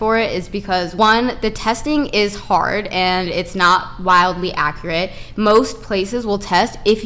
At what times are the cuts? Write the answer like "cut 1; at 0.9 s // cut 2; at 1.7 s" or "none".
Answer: cut 1; at 0.9 s